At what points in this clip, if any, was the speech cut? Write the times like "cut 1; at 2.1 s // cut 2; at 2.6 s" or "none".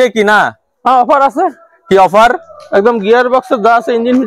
none